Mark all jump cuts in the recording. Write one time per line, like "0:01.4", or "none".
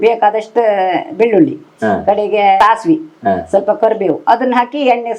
0:02.6
0:04.2